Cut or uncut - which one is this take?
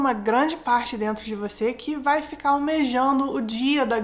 uncut